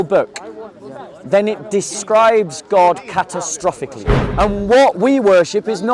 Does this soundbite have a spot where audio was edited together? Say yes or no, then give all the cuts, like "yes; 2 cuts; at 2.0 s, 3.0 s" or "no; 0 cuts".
yes; 1 cut; at 4.2 s